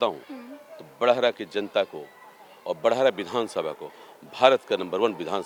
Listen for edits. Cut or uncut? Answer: uncut